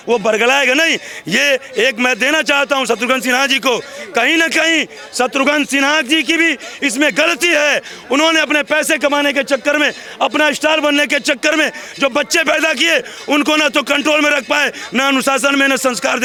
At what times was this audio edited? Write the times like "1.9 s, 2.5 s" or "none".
none